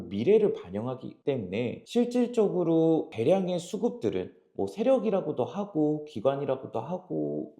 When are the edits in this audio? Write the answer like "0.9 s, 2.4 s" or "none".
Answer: 1.8 s